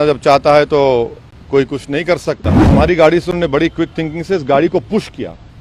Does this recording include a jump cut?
yes; 1 cut; at 2.6 s

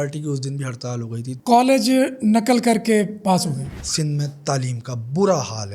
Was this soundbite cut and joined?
yes; 2 cuts; at 1.4 s, 3.8 s

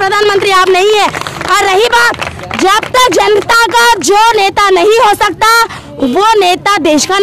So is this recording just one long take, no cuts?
yes; 0 cuts

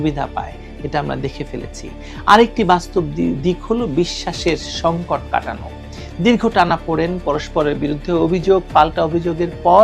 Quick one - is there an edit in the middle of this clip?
no; 0 cuts

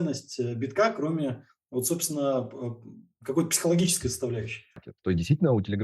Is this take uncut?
no; 1 cut; at 4.9 s

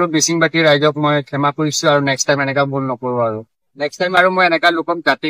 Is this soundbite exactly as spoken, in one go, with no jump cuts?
yes; 0 cuts

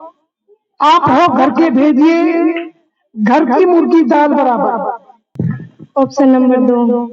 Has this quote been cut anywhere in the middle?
no; 0 cuts

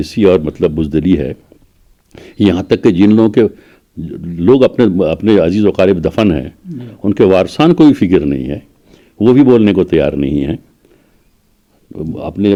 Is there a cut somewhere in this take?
no; 0 cuts

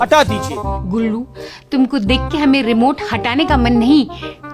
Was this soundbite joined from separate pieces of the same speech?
no; 0 cuts

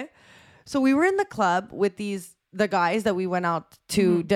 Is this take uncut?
yes; 0 cuts

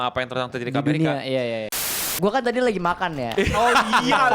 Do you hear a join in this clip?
yes; 1 cut; at 1.8 s

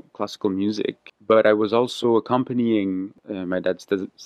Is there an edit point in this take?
yes; 2 cuts; at 1.1 s, 3.1 s

